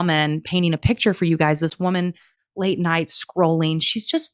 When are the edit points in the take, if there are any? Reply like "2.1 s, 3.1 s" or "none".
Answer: none